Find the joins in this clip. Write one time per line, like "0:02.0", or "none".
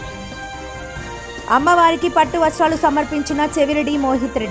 0:01.4